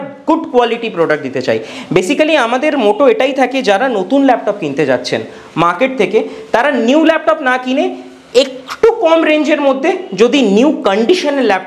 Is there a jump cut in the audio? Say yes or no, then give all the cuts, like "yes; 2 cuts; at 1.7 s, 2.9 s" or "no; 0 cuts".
no; 0 cuts